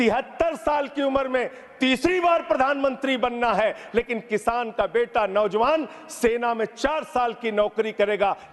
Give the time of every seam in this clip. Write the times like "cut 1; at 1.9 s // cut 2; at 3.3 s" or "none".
none